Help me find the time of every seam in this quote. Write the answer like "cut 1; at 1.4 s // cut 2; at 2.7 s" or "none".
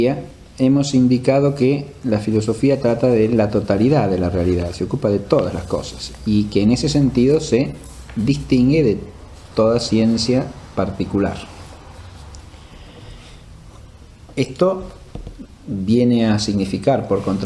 cut 1; at 13.7 s